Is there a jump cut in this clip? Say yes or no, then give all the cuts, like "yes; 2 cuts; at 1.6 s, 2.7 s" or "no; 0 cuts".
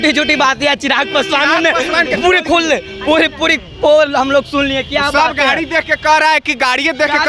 no; 0 cuts